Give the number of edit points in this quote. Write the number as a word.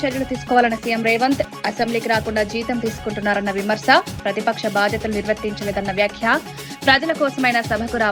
zero